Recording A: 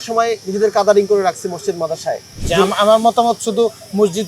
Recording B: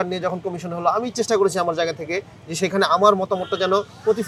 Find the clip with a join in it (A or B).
A